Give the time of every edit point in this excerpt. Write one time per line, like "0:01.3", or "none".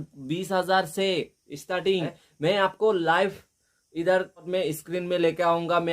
0:02.2
0:04.5